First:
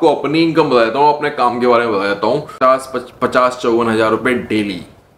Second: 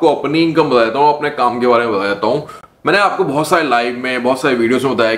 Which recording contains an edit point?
first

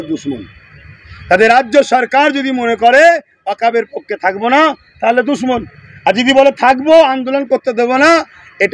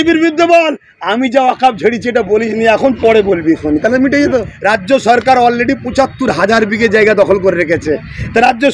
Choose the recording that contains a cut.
second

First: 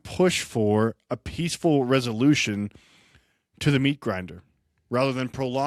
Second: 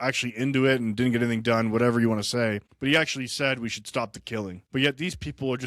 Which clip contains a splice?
second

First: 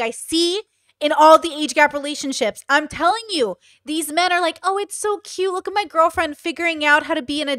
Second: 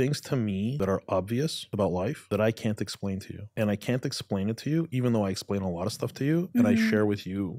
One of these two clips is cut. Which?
second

